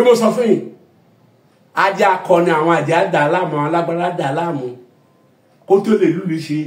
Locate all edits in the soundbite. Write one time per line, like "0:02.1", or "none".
none